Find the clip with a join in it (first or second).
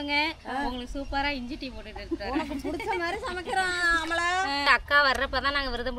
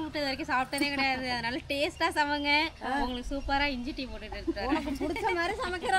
first